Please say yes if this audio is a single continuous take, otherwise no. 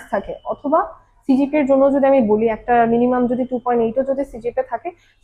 yes